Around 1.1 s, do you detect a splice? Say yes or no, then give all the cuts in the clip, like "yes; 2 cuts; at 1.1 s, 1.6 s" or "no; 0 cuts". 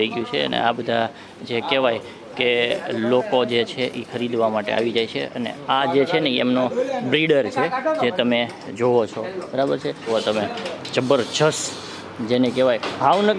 no; 1 cut; at 10.1 s